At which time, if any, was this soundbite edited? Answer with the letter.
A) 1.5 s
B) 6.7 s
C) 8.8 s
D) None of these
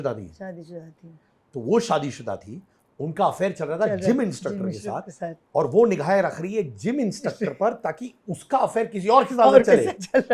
D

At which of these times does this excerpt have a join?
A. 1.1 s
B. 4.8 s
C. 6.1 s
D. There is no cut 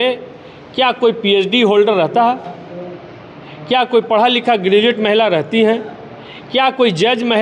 D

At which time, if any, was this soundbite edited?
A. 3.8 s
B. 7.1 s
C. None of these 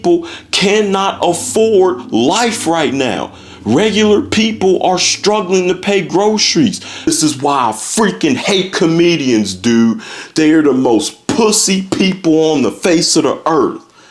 B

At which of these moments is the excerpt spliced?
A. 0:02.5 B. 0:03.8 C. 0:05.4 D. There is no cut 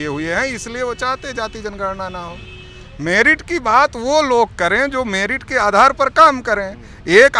D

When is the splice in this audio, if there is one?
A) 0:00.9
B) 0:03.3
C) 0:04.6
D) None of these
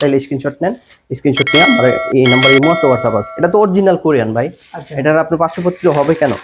B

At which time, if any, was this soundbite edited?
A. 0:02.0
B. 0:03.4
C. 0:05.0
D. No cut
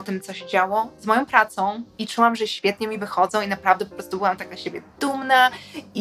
A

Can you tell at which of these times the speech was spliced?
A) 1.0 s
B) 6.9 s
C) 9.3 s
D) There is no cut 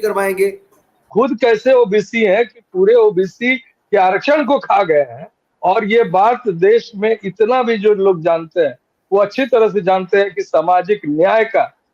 A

